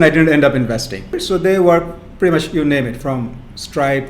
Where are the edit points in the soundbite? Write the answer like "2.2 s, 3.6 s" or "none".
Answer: 1.1 s